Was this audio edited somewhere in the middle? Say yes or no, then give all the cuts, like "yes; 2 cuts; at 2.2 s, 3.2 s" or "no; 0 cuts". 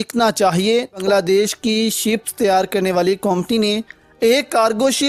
yes; 1 cut; at 1.0 s